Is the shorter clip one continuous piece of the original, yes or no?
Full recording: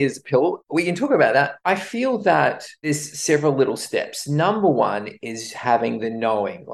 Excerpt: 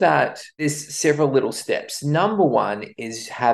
yes